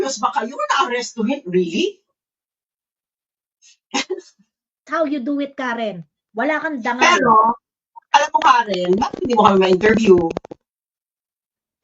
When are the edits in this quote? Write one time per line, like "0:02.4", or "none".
0:04.8